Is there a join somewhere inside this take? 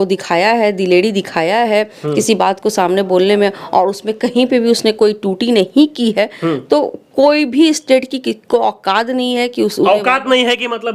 no; 0 cuts

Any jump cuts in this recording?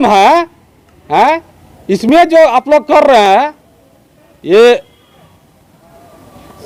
no; 0 cuts

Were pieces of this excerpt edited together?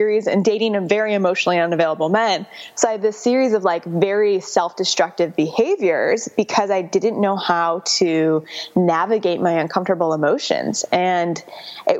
no; 0 cuts

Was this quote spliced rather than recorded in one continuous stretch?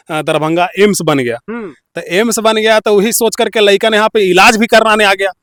no; 0 cuts

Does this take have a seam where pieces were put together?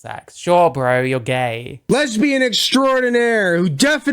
yes; 1 cut; at 1.9 s

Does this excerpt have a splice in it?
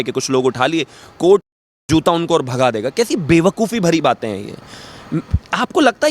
no; 0 cuts

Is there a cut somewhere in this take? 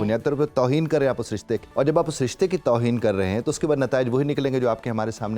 yes; 1 cut; at 1.7 s

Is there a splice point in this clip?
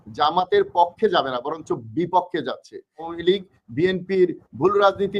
yes; 1 cut; at 3.1 s

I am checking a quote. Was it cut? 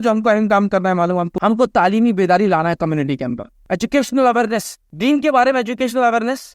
yes; 3 cuts; at 1.3 s, 3.5 s, 4.8 s

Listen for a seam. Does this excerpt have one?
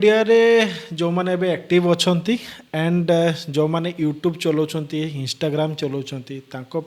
no; 0 cuts

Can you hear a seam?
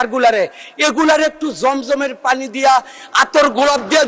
no; 0 cuts

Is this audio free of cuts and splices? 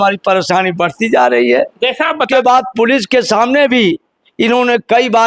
no; 1 cut; at 2.2 s

